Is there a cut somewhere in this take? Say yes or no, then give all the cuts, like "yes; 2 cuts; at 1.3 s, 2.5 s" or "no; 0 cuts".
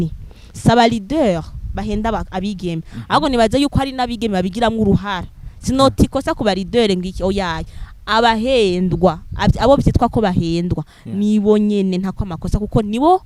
no; 0 cuts